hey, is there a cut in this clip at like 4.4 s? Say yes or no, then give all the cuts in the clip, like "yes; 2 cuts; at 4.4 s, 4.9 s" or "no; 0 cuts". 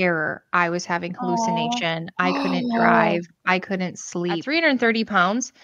yes; 1 cut; at 4.4 s